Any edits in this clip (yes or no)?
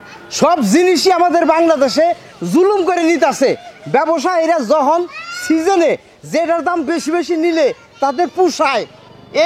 no